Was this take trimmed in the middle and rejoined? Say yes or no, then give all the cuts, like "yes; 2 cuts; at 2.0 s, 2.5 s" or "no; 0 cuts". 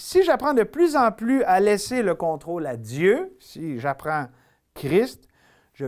no; 0 cuts